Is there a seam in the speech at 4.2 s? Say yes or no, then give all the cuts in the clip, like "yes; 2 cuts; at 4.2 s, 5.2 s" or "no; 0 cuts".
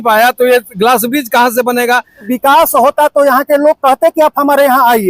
no; 1 cut; at 2.3 s